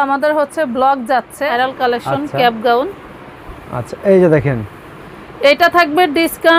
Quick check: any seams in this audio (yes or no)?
yes